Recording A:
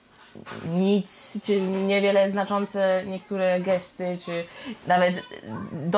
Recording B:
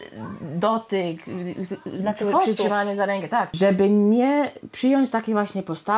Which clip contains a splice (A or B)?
B